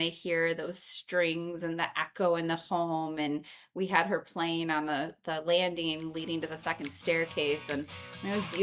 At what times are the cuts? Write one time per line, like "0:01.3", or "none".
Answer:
none